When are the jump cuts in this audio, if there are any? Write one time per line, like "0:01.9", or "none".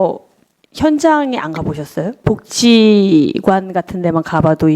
0:02.2